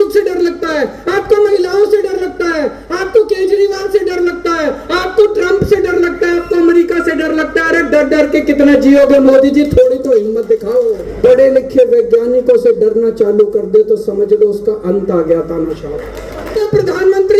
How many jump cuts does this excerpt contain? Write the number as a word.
two